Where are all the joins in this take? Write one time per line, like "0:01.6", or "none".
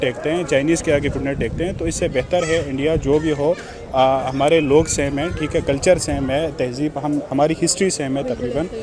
none